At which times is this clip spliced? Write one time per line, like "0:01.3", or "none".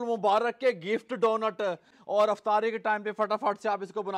0:01.9